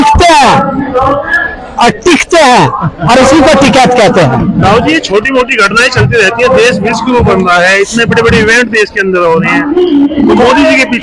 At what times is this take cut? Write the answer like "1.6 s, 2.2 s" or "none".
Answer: none